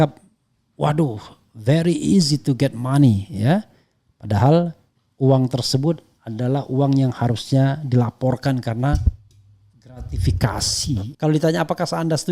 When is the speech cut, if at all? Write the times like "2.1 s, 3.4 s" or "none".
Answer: 11.1 s